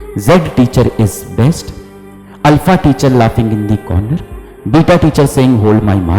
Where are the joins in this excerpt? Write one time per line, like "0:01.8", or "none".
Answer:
none